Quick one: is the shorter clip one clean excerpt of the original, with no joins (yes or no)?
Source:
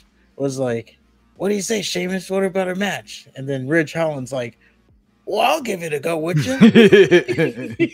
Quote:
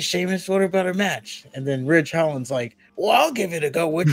no